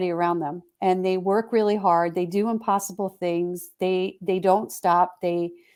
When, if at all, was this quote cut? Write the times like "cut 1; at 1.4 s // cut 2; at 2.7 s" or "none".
none